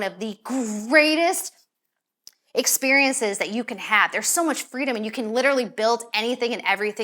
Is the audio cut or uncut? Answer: uncut